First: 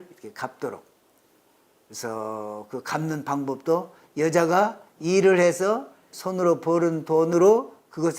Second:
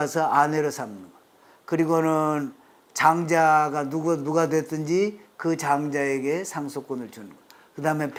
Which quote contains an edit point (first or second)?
first